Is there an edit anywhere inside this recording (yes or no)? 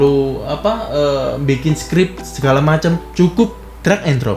yes